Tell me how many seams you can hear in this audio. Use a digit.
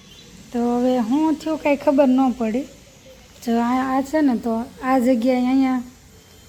0